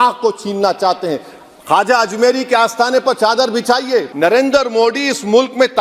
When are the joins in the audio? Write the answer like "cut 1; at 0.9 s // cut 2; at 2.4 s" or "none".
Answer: cut 1; at 4.1 s